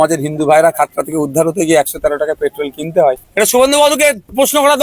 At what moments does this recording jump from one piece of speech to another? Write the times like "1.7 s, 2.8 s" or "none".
3.2 s

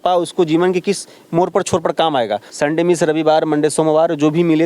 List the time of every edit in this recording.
2.5 s

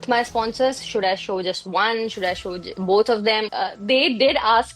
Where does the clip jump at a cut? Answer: 3.5 s

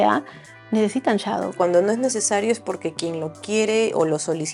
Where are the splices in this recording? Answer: 1.6 s

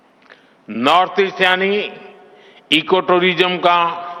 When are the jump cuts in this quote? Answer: none

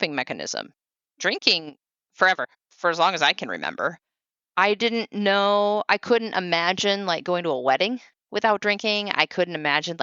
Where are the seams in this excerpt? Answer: 2.6 s

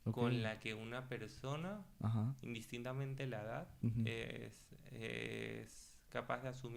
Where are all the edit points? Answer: none

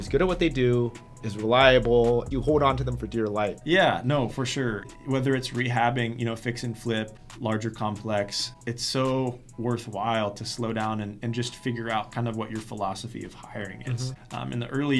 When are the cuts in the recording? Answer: 2.3 s, 3.6 s, 4.8 s, 7.2 s, 8.5 s, 14.1 s

